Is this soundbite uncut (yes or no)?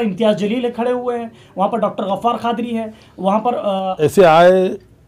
no